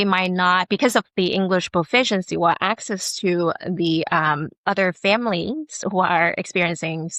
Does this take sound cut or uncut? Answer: uncut